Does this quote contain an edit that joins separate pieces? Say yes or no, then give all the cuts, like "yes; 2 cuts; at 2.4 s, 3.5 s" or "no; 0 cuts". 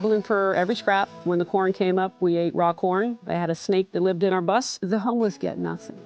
yes; 3 cuts; at 1.2 s, 3.2 s, 4.7 s